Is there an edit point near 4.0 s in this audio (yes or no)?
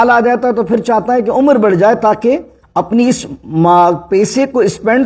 no